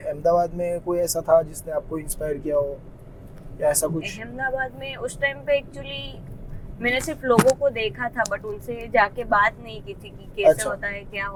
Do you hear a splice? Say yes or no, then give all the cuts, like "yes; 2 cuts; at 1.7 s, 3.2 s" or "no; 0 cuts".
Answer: no; 0 cuts